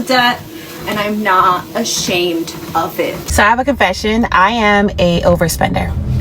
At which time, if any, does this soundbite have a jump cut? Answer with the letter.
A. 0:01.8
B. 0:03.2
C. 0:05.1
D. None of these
B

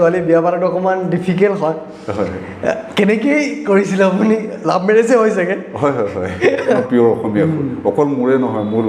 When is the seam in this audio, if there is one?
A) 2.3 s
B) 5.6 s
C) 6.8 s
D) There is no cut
C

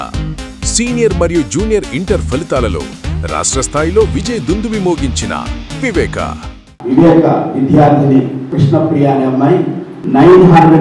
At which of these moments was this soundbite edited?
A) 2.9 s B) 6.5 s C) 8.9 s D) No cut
D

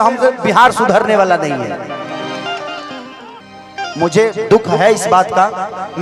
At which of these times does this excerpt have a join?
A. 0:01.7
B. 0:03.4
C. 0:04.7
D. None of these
B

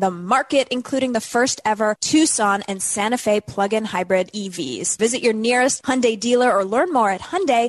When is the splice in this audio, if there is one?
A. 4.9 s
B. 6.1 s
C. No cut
A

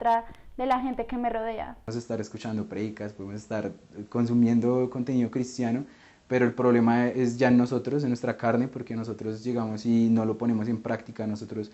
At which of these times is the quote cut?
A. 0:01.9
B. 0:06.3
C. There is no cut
A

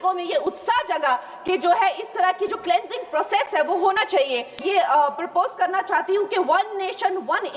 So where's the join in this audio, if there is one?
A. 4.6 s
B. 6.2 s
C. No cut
A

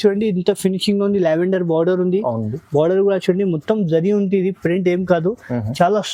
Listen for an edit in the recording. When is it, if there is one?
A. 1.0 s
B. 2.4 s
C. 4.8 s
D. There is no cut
D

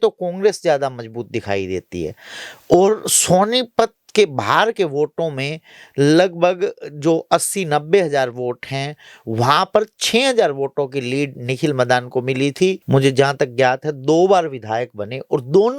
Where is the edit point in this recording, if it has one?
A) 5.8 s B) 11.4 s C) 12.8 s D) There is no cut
C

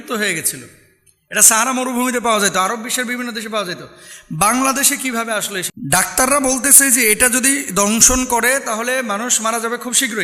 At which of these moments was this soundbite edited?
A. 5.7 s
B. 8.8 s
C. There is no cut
A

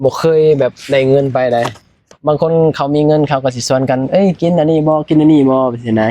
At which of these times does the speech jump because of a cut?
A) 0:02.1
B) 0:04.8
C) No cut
A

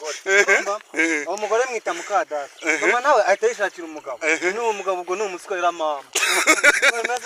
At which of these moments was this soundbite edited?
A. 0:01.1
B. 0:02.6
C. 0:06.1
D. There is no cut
D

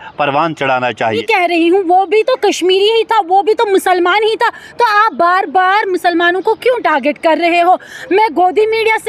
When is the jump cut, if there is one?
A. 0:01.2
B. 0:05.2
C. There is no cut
A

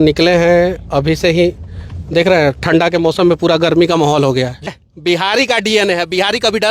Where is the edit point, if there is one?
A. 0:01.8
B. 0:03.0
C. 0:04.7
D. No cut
C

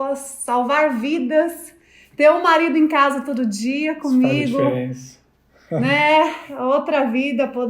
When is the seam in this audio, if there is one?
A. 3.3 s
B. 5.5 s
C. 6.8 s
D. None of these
D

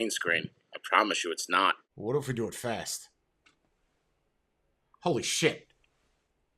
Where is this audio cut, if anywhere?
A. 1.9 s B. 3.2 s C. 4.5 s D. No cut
A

